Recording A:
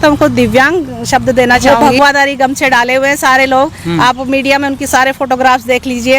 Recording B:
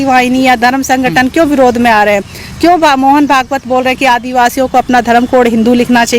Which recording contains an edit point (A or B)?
A